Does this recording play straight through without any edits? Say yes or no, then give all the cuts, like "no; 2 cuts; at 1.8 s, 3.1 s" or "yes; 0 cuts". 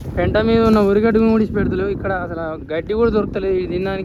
yes; 0 cuts